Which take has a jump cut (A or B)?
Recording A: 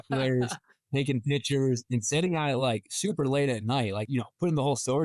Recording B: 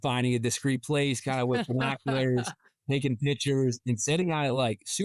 A